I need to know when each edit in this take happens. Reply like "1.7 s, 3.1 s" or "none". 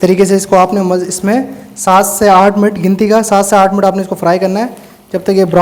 none